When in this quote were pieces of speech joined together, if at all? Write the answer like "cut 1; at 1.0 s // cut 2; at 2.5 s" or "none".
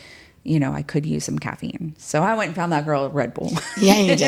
none